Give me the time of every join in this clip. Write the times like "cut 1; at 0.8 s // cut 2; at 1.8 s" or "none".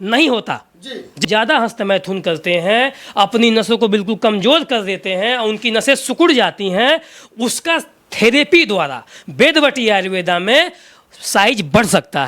cut 1; at 1.2 s